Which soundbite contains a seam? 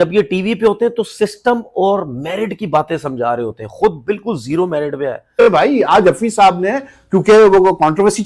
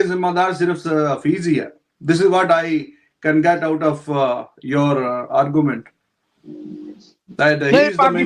first; 1 cut; at 5.5 s

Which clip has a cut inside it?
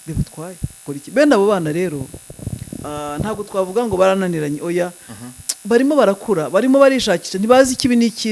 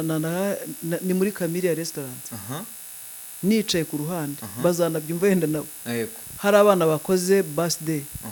first; 1 cut; at 0.9 s

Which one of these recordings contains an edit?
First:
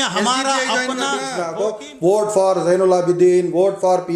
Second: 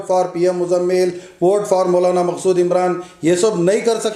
first; 1 cut; at 1.4 s

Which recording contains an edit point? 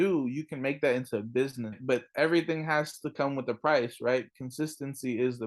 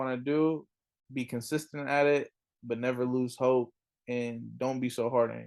first; 1 cut; at 1.8 s

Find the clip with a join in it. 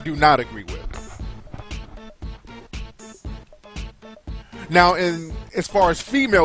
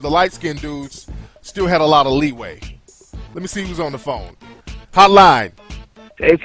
first; 1 cut; at 2.6 s

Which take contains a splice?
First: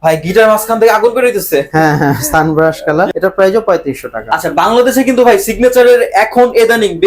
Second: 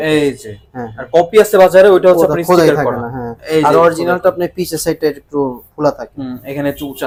first; 2 cuts; at 3.1 s, 4.2 s

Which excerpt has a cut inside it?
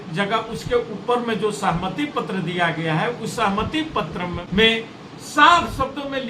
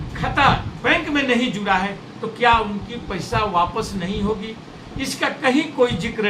first; 1 cut; at 4.4 s

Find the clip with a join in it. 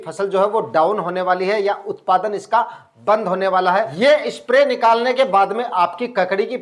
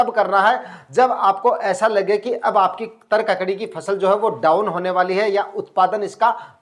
first; 1 cut; at 3.9 s

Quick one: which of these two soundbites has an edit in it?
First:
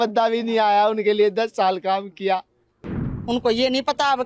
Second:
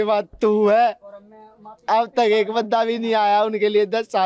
first; 1 cut; at 3.1 s

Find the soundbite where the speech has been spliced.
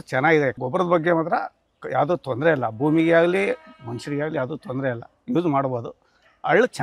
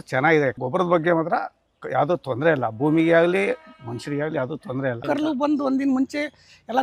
second; 1 cut; at 5.0 s

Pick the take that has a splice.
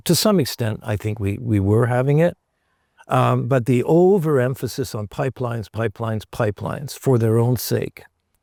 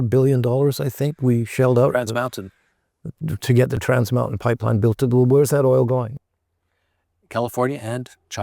second; 1 cut; at 3.8 s

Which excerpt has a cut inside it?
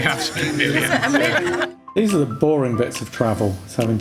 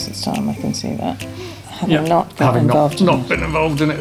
first; 1 cut; at 1.9 s

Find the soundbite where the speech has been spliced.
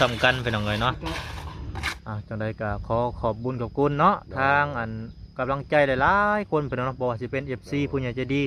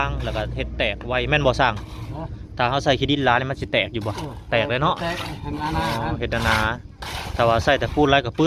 first; 1 cut; at 1.9 s

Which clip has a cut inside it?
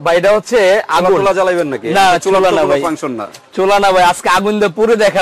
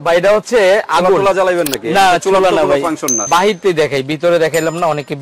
second; 1 cut; at 3.2 s

